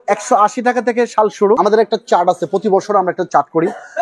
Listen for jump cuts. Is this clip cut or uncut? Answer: cut